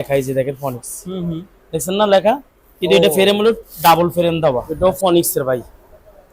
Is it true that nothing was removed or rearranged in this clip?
no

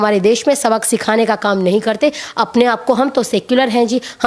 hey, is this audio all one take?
yes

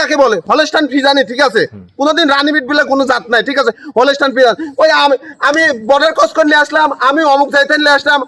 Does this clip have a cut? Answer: no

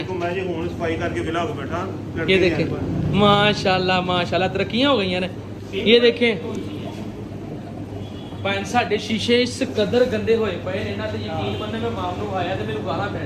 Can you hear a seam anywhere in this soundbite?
no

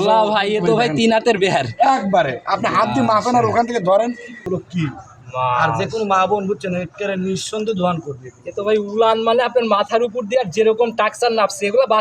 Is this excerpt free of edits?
no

